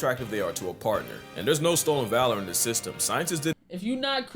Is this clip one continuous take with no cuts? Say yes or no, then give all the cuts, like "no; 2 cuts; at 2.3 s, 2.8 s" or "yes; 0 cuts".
no; 2 cuts; at 1.4 s, 3.5 s